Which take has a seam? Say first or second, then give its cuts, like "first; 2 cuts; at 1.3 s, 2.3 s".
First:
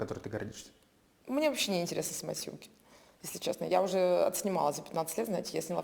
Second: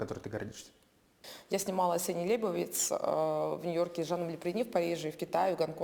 second; 1 cut; at 1.2 s